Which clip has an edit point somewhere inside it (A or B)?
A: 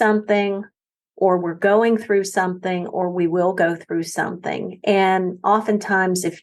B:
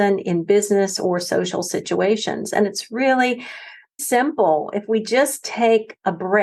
B